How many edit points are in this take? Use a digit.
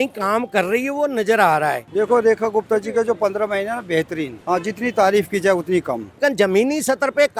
3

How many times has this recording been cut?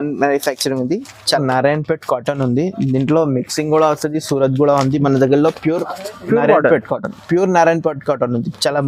1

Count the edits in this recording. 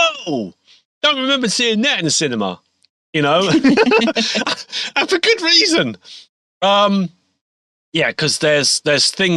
0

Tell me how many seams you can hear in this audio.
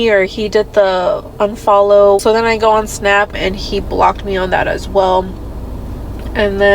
2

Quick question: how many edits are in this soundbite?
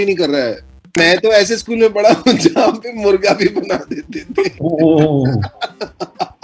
1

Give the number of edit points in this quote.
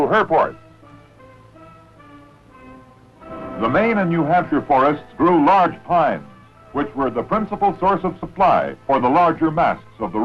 0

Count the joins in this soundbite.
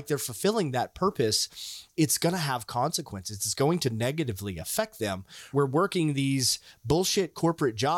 2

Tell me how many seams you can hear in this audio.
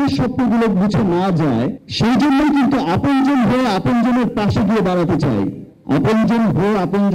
2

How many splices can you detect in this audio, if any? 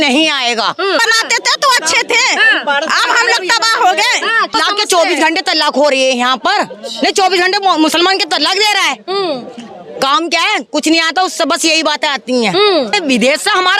3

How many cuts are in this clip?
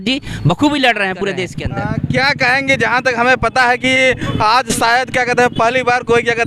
1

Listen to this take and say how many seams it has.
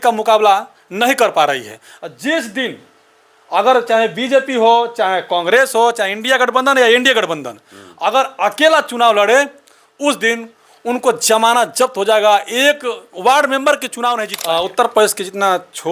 1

